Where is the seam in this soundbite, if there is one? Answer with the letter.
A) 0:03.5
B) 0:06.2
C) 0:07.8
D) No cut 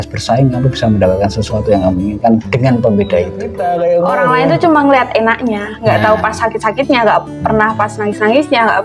A